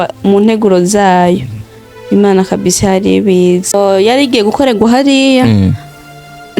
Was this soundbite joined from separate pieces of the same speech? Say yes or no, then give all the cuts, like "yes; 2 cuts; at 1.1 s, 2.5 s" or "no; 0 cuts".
yes; 1 cut; at 3.7 s